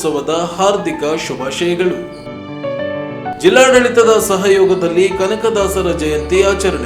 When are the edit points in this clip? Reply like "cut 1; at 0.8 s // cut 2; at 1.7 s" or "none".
none